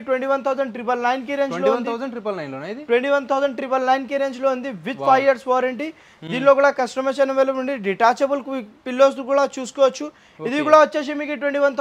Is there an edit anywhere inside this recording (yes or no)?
no